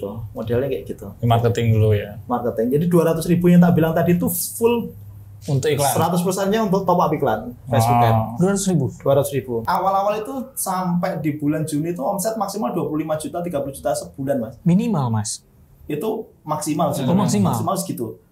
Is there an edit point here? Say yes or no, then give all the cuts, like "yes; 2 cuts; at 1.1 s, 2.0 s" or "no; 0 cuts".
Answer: yes; 1 cut; at 9.7 s